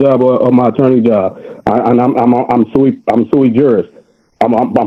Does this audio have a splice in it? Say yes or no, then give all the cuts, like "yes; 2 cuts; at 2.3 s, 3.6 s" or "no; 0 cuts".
no; 0 cuts